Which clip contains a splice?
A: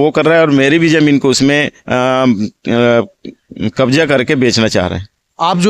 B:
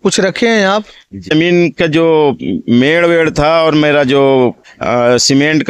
B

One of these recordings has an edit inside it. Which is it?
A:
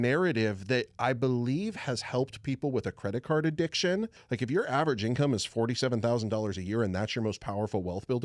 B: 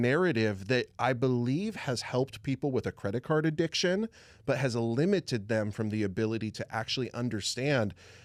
A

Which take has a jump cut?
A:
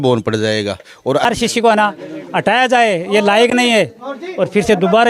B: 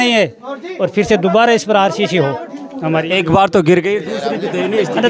A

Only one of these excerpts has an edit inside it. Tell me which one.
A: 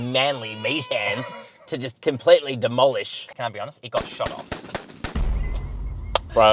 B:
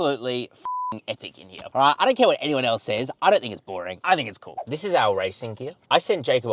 B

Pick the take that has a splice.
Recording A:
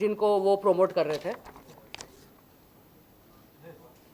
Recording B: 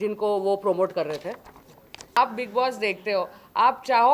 B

